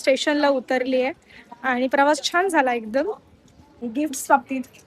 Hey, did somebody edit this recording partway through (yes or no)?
yes